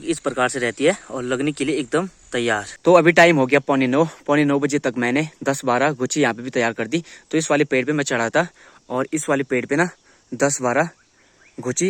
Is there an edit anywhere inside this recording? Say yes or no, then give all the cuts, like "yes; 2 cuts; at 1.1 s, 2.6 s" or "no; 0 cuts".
no; 0 cuts